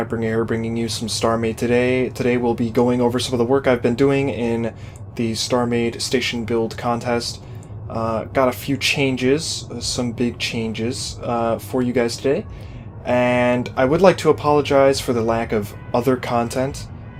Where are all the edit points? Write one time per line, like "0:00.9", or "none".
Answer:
none